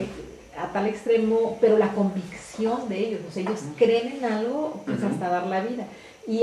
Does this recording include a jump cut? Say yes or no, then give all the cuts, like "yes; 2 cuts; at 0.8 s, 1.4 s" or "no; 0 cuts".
no; 0 cuts